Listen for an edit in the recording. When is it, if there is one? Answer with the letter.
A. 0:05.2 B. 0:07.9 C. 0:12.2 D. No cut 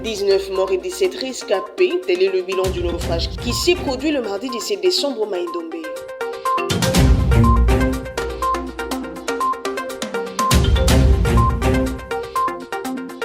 C